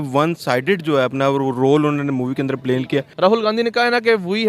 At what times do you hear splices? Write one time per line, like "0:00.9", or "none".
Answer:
0:03.1